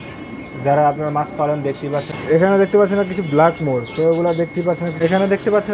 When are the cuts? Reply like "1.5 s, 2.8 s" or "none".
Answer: 2.1 s, 4.9 s